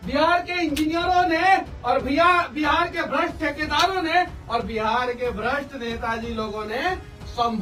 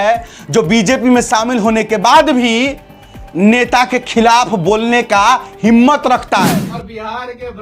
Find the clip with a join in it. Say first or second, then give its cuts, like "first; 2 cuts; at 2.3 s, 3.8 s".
second; 1 cut; at 6.6 s